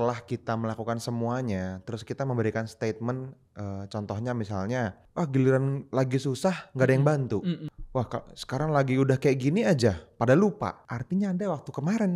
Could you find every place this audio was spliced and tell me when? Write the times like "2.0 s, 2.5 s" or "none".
5.0 s, 7.7 s, 10.9 s